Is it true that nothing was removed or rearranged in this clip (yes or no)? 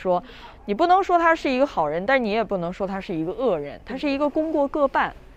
yes